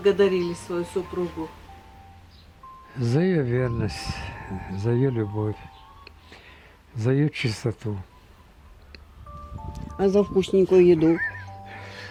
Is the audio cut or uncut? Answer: uncut